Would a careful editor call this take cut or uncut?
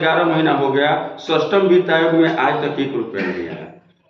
uncut